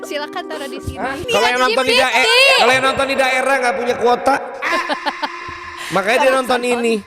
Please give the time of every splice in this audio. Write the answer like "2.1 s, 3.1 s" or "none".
1.2 s